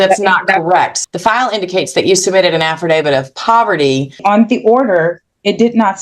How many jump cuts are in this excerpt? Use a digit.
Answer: 2